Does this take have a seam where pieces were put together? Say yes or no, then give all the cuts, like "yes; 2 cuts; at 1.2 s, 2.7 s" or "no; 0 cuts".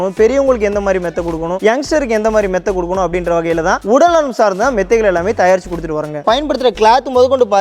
yes; 1 cut; at 6.2 s